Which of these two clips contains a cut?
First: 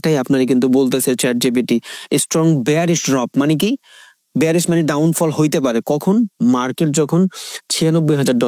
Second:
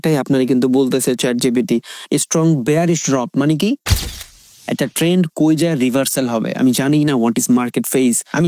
second; 1 cut; at 4.3 s

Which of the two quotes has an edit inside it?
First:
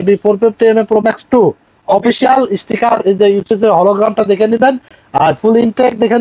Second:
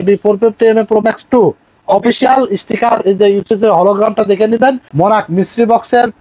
second; 1 cut; at 4.9 s

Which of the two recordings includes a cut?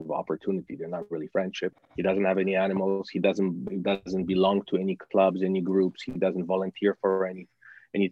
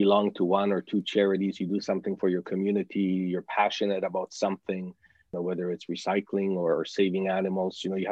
second; 1 cut; at 5.3 s

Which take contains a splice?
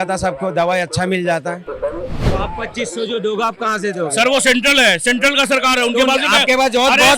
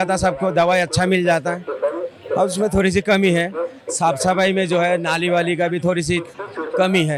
first; 1 cut; at 2.2 s

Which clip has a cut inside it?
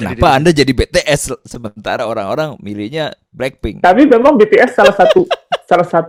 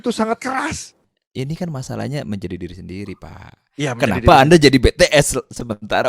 second; 1 cut; at 1.1 s

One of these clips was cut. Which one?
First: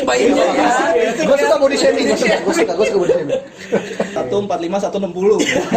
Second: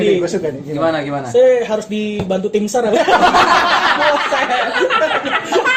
first; 1 cut; at 4.1 s

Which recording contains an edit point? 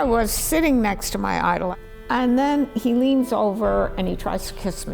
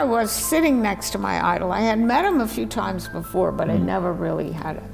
first; 1 cut; at 1.7 s

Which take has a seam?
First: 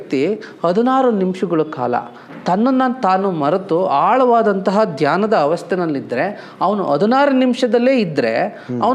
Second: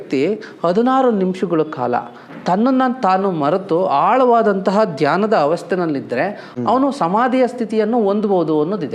second; 1 cut; at 6.4 s

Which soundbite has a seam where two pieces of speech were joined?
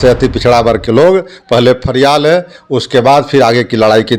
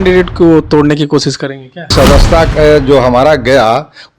second; 1 cut; at 1.9 s

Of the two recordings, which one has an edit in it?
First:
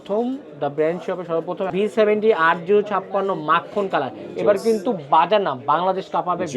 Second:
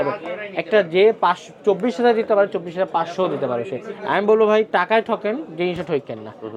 first; 1 cut; at 1.7 s

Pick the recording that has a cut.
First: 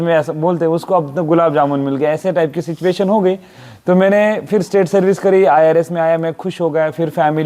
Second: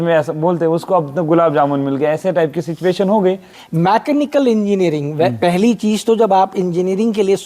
second; 1 cut; at 3.6 s

